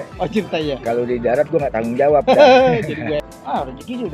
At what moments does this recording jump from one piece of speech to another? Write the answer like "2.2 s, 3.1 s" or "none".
3.2 s